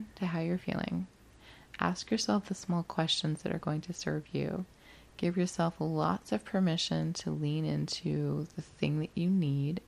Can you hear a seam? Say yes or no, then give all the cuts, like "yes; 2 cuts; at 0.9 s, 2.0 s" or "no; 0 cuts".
no; 0 cuts